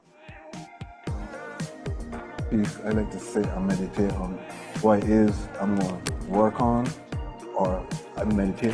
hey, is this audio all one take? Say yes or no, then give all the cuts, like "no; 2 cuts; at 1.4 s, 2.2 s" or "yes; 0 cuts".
yes; 0 cuts